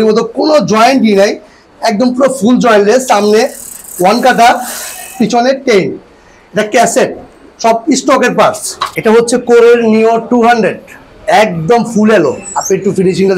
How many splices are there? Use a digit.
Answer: 1